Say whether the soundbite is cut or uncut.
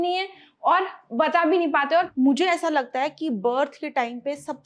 cut